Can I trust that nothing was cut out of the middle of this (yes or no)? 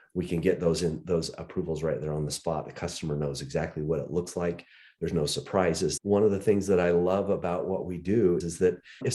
no